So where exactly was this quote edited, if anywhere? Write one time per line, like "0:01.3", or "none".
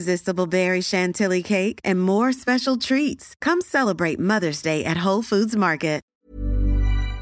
0:06.0